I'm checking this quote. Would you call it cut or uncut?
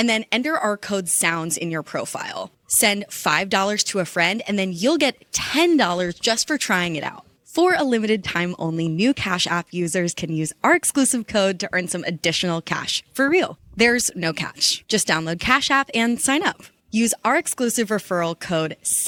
uncut